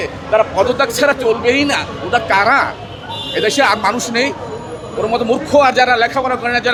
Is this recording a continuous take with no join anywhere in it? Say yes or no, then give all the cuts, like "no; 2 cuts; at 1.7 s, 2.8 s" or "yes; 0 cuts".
yes; 0 cuts